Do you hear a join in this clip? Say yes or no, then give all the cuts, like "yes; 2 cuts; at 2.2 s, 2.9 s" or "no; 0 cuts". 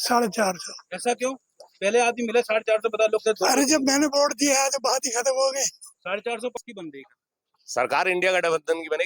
yes; 1 cut; at 6.6 s